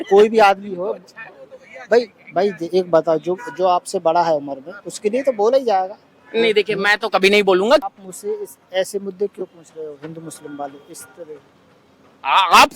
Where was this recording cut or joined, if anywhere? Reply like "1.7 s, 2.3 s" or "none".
7.8 s